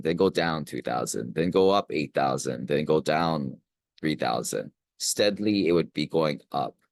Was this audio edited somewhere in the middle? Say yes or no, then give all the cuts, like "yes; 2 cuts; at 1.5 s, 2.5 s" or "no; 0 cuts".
no; 0 cuts